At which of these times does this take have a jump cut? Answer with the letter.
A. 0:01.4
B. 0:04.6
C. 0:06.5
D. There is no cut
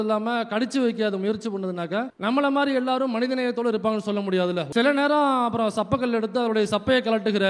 B